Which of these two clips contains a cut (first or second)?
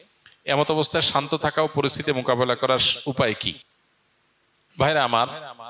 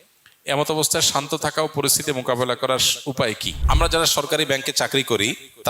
second